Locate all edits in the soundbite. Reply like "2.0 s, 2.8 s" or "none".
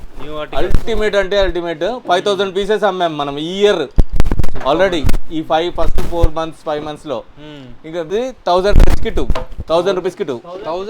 8.1 s